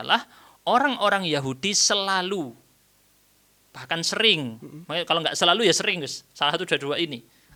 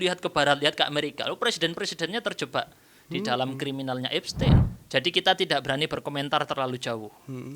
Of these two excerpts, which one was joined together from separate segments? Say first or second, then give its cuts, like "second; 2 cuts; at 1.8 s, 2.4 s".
second; 1 cut; at 4.7 s